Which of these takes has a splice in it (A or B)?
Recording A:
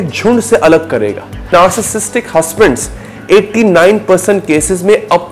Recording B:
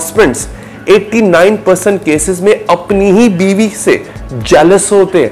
A